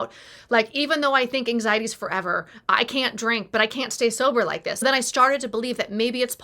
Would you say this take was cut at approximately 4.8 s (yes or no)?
yes